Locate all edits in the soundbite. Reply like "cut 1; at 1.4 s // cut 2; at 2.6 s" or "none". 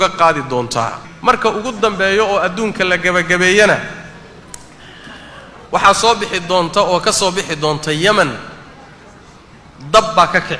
cut 1; at 1.1 s